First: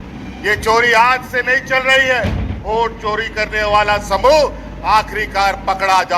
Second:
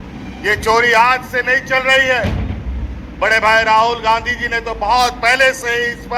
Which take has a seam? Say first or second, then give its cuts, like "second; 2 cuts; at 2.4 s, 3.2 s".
first; 1 cut; at 2.6 s